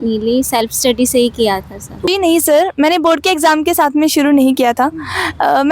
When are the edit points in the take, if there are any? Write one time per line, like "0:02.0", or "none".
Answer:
0:02.1